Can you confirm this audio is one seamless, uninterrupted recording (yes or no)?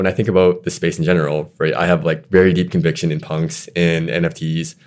yes